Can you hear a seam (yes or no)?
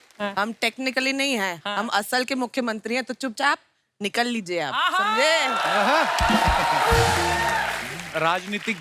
no